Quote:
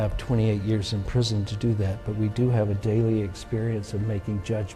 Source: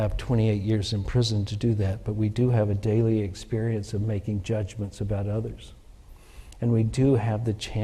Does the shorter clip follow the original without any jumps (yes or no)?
yes